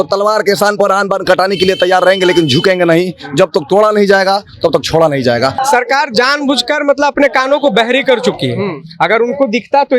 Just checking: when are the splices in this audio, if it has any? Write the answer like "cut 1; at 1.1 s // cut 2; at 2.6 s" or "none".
cut 1; at 5.6 s